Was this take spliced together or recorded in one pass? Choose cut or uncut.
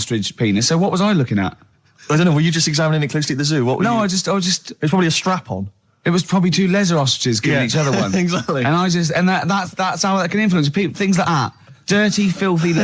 uncut